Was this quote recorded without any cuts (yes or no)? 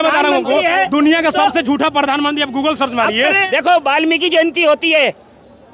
no